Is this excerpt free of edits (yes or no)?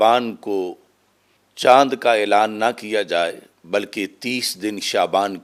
yes